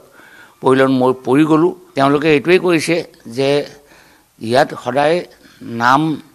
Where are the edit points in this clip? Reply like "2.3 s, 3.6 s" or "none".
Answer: 1.8 s